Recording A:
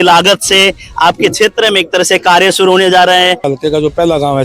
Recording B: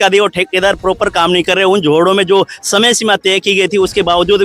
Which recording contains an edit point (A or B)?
A